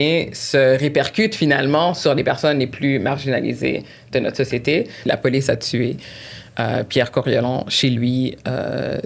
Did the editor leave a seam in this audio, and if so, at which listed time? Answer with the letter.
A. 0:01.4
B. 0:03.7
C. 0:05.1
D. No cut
C